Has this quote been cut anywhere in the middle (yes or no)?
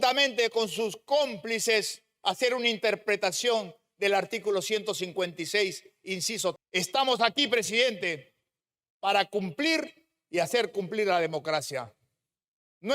yes